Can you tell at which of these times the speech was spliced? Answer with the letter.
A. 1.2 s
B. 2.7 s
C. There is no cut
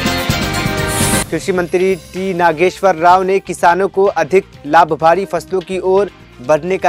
A